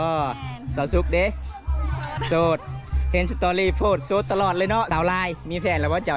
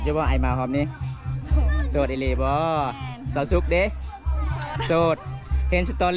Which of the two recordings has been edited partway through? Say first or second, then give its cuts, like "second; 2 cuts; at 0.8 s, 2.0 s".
first; 1 cut; at 4.9 s